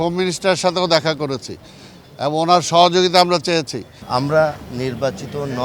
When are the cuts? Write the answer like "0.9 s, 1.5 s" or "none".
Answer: 3.9 s